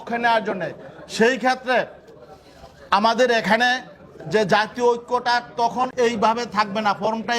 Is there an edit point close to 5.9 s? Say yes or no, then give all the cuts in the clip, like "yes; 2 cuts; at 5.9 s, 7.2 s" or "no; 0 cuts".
yes; 1 cut; at 5.9 s